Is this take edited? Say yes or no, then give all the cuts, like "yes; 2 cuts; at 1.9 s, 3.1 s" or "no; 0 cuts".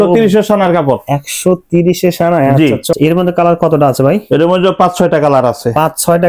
yes; 1 cut; at 2.9 s